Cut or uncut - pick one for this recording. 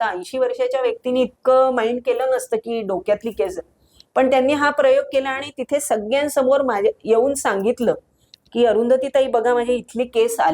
uncut